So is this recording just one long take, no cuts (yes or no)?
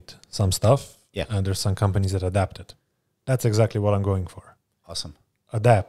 yes